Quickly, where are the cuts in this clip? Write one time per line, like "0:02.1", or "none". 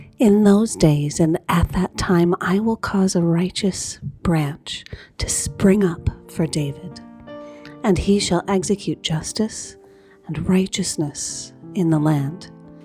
none